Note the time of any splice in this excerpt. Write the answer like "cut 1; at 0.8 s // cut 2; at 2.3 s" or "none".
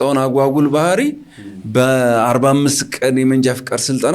none

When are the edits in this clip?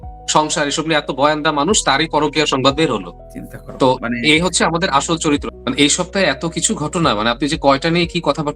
cut 1; at 5.4 s

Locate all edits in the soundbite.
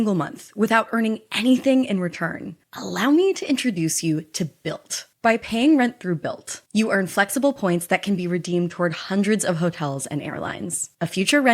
cut 1; at 5.0 s

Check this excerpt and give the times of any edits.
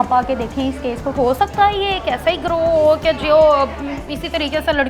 cut 1; at 1.1 s

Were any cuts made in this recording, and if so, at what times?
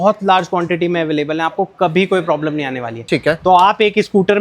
cut 1; at 2.9 s

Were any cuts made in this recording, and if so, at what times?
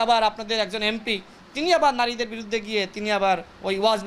none

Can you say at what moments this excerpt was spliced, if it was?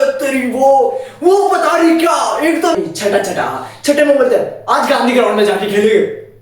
cut 1; at 2.8 s

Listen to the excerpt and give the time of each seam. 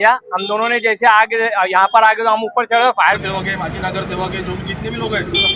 cut 1; at 3.2 s

